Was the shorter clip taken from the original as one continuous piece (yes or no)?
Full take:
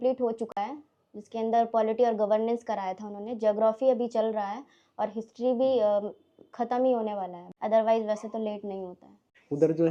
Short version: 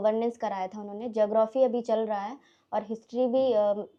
yes